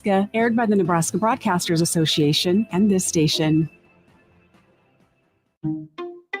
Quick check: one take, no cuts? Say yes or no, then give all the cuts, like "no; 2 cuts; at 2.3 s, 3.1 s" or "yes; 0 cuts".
no; 1 cut; at 5.5 s